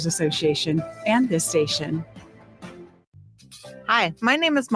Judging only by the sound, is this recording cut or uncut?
cut